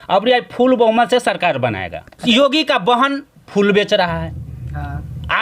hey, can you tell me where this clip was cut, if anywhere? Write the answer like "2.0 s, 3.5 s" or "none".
2.2 s